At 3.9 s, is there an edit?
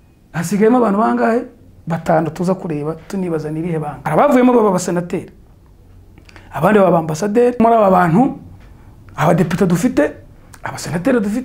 yes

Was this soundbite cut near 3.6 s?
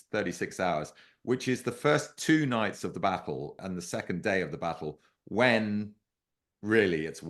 yes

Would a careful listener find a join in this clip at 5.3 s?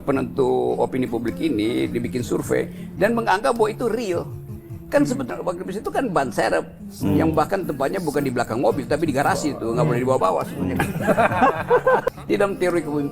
yes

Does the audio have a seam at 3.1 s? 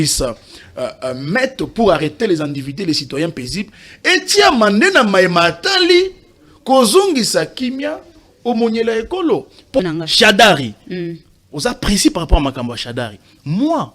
no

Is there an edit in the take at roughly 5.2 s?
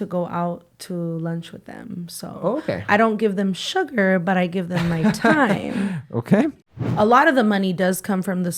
no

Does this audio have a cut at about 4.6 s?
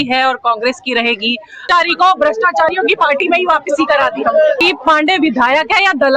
yes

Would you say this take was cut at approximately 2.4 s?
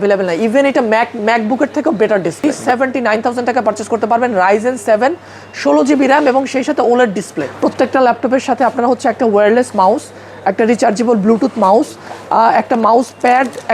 yes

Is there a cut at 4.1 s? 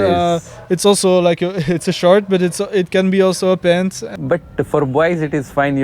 yes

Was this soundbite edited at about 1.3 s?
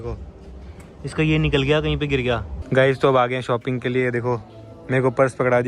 no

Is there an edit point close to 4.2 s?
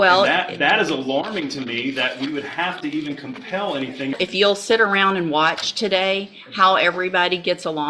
yes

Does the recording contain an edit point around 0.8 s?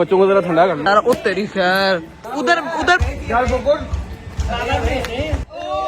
yes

